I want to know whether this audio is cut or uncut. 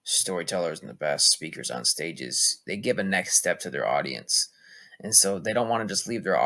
uncut